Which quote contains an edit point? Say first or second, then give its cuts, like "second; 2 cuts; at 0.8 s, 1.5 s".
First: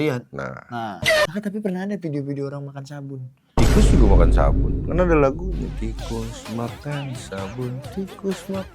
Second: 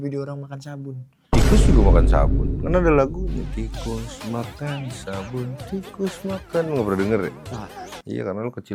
first; 1 cut; at 1.3 s